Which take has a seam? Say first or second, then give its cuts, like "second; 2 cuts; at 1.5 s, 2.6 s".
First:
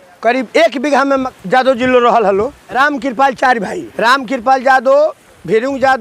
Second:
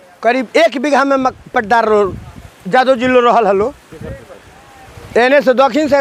first; 3 cuts; at 1.3 s, 2.6 s, 3.8 s